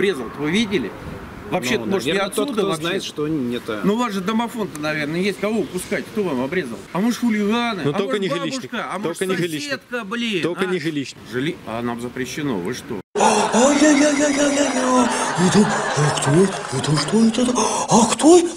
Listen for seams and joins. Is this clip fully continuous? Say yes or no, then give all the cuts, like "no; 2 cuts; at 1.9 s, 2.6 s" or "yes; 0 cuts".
no; 2 cuts; at 6.8 s, 11.2 s